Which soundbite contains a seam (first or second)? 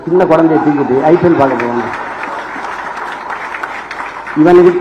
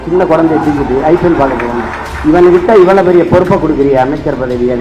second